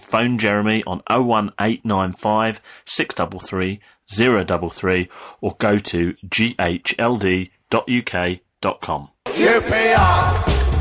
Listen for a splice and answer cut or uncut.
cut